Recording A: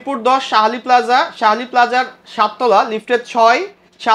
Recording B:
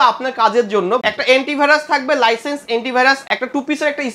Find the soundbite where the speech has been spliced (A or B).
B